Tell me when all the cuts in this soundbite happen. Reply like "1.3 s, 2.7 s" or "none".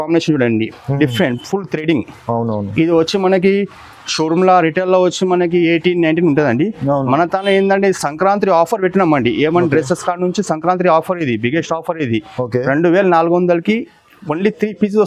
none